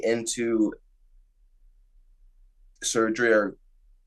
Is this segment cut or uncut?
uncut